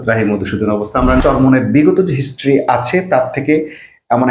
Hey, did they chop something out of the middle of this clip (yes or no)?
yes